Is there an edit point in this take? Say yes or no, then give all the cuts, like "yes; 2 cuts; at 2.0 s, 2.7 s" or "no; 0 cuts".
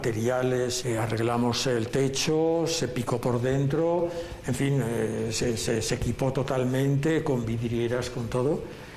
no; 0 cuts